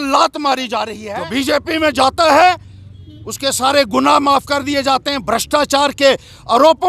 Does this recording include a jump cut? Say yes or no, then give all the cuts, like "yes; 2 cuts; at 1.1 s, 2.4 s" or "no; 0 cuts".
yes; 1 cut; at 1.0 s